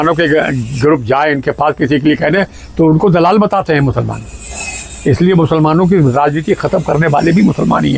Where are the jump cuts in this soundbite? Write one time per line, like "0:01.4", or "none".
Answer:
none